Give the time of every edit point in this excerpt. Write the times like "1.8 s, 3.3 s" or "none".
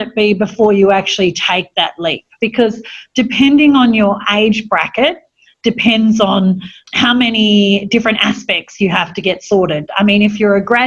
2.3 s, 6.8 s

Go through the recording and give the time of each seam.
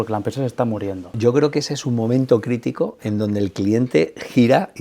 1.1 s

